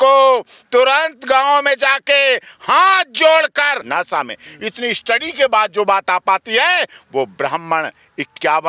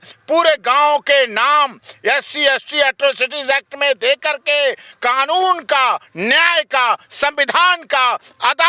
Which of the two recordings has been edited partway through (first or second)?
first